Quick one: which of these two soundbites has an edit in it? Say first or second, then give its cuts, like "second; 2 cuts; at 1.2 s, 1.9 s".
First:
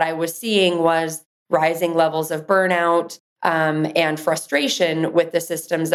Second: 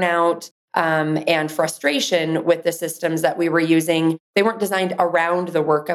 second; 1 cut; at 4.3 s